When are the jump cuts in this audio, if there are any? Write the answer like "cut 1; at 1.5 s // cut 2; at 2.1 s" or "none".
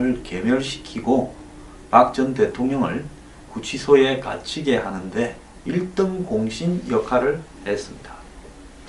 cut 1; at 2.1 s